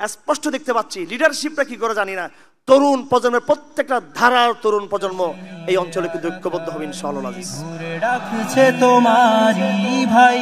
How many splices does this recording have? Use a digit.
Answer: 1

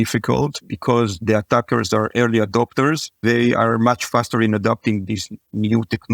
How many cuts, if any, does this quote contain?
1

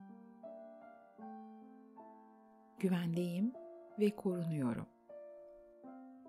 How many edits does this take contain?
2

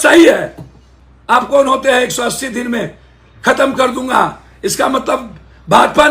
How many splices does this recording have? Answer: 1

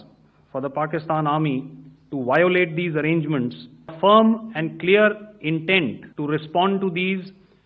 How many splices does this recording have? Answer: 2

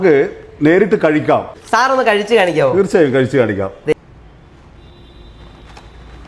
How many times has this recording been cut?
2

